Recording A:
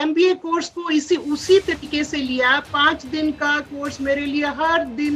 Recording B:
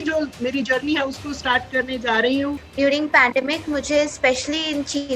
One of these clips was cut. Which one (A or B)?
B